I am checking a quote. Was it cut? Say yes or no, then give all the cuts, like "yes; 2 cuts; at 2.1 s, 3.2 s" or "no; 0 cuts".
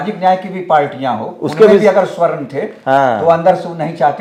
no; 0 cuts